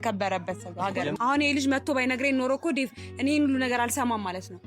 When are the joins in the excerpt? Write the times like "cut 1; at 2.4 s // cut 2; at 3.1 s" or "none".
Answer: cut 1; at 1.1 s